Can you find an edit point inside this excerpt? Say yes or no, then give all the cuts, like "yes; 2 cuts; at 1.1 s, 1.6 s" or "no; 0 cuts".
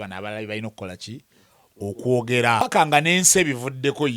yes; 1 cut; at 2.6 s